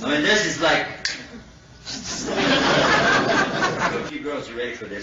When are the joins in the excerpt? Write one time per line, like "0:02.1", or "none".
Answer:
0:04.0